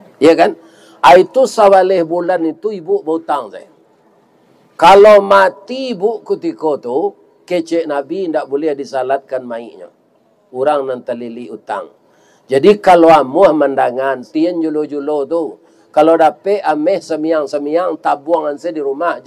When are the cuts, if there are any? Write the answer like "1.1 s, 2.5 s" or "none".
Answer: 14.2 s